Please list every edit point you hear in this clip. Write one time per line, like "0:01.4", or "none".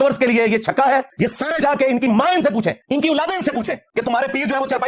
0:01.1
0:02.8
0:03.8